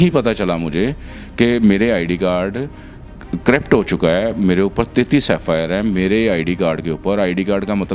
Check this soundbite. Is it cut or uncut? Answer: uncut